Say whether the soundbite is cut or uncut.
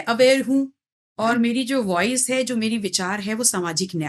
uncut